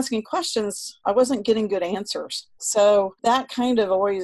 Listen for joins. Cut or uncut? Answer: cut